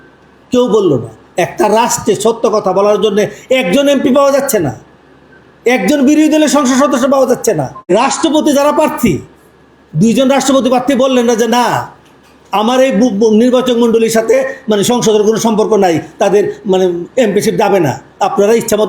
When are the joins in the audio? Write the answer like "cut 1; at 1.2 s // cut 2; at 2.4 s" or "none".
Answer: cut 1; at 7.9 s